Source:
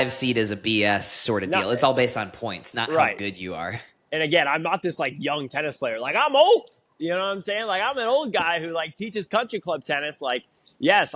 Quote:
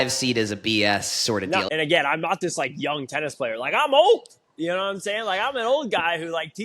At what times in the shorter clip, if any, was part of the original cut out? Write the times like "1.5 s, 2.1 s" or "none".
1.7 s